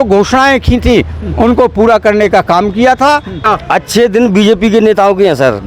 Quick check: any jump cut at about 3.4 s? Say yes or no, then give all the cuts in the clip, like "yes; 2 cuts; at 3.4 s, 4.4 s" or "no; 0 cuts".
yes; 1 cut; at 3.4 s